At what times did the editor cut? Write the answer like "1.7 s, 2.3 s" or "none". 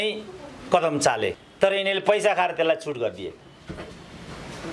1.4 s